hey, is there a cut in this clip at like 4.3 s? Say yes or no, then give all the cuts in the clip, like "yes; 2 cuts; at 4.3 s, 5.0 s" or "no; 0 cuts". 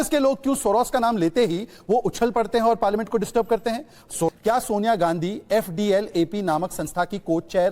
yes; 2 cuts; at 2.8 s, 4.3 s